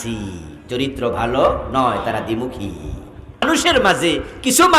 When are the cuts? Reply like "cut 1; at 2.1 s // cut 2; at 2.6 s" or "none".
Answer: cut 1; at 3.4 s